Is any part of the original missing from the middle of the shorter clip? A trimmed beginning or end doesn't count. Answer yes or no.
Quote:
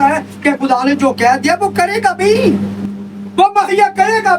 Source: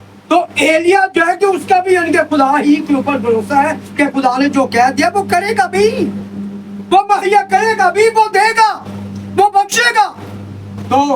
no